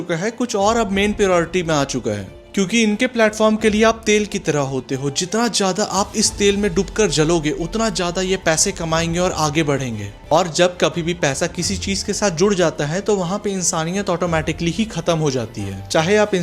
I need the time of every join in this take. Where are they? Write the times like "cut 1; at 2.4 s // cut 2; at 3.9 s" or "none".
cut 1; at 2.3 s // cut 2; at 10.1 s